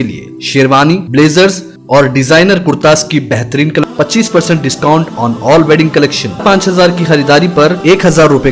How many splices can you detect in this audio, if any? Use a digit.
2